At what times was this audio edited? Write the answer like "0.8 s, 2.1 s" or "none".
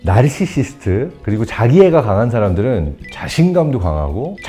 none